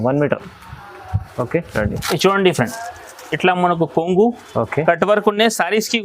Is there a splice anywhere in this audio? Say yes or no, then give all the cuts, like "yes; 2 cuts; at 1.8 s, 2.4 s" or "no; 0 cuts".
yes; 1 cut; at 1.7 s